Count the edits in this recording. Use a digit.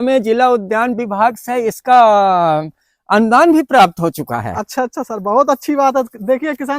0